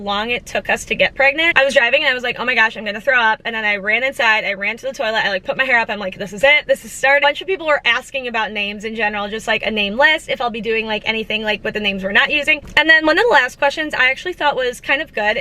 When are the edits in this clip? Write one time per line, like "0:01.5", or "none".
0:01.5
0:07.2
0:12.6